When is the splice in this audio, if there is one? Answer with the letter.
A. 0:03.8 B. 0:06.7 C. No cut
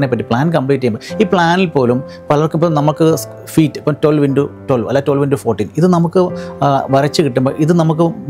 C